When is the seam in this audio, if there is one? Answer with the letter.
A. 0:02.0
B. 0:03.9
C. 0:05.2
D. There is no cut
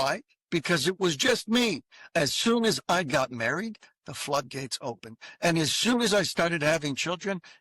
A